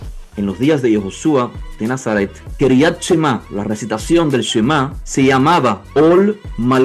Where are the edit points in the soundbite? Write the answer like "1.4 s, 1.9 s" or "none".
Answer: 2.4 s, 3.5 s, 5.0 s, 5.8 s